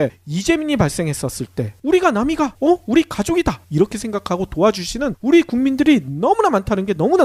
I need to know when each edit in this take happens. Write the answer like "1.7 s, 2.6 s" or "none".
none